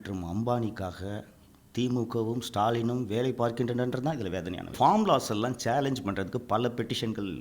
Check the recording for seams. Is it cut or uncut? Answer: cut